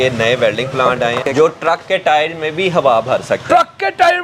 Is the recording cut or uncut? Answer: cut